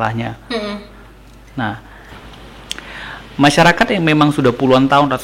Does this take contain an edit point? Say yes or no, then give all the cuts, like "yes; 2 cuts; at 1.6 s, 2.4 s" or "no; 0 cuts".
yes; 1 cut; at 2.1 s